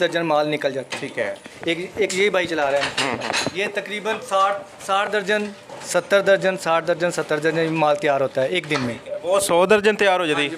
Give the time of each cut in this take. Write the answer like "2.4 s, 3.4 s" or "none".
1.5 s, 3.5 s

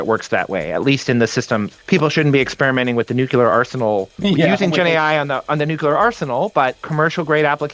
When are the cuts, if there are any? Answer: 6.8 s

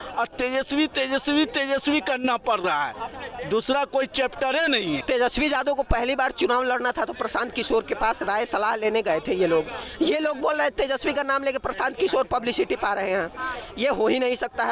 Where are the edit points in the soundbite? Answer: 5.0 s

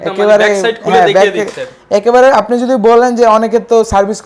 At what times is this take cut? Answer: none

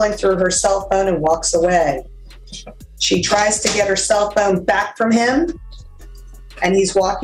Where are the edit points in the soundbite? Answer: none

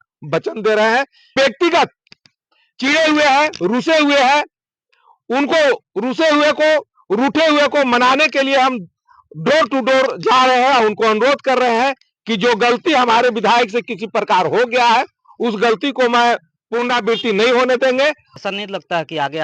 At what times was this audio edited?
1.3 s, 18.3 s

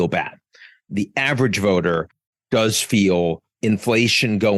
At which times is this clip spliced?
3.6 s

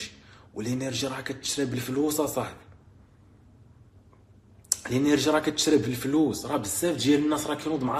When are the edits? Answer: none

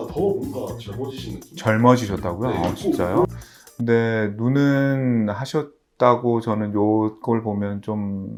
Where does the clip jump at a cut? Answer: none

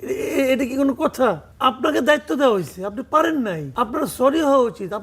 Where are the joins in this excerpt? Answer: 1.5 s, 3.7 s

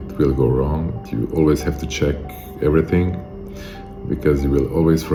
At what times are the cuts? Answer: none

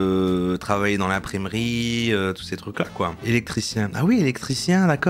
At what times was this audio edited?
3.2 s

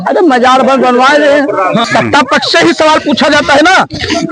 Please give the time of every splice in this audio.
1.9 s

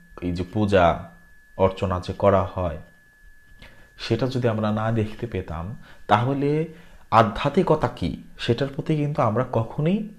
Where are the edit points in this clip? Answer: none

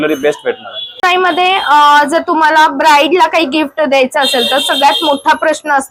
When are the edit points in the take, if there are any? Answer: none

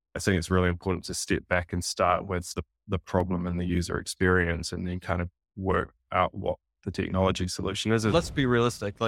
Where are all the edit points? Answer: 8.1 s

